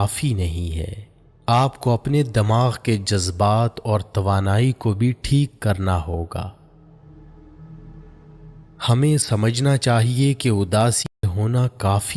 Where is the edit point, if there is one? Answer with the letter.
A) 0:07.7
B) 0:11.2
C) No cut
B